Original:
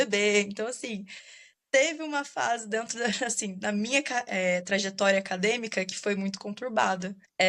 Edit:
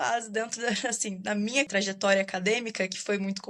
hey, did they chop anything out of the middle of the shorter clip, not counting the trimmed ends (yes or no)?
yes